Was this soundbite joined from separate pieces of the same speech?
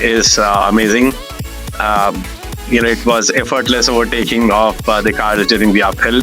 no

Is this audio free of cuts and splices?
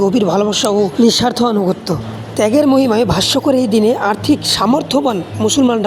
yes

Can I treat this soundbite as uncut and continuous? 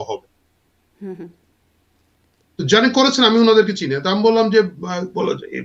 yes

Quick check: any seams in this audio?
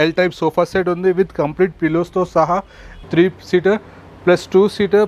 yes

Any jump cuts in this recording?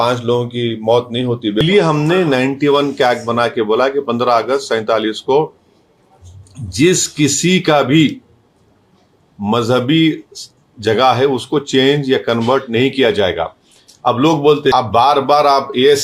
yes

